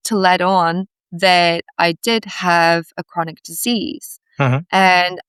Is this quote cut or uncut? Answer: uncut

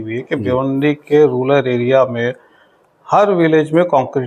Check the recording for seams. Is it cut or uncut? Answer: uncut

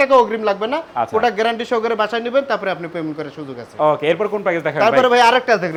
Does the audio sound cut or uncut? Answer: uncut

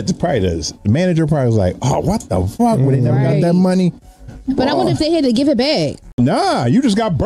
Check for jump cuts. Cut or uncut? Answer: cut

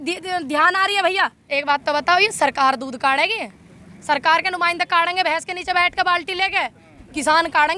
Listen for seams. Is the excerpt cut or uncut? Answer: cut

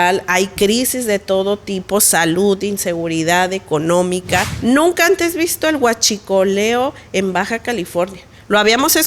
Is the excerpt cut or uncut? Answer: cut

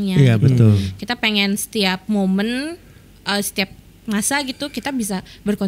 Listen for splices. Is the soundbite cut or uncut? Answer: uncut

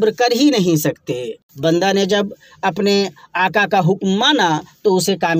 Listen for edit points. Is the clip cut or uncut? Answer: uncut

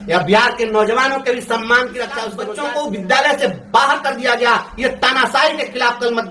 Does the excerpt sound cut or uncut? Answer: cut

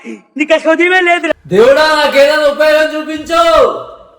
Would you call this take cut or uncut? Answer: cut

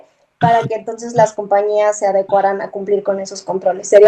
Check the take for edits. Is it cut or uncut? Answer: uncut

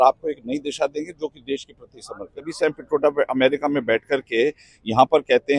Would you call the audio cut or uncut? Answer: cut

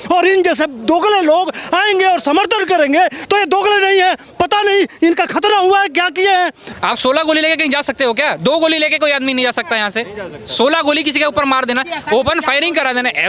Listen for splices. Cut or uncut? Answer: cut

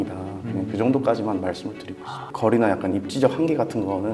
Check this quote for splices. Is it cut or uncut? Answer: cut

